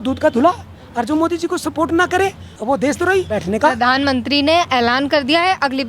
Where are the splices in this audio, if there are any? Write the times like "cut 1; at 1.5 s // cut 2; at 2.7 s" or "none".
cut 1; at 2.5 s // cut 2; at 3.3 s